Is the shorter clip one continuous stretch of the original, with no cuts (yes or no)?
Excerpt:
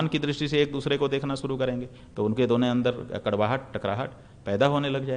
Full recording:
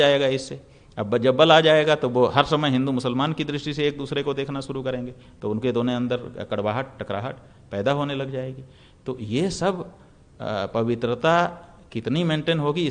yes